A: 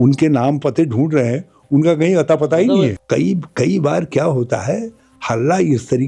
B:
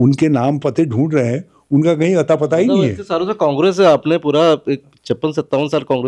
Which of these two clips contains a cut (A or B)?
A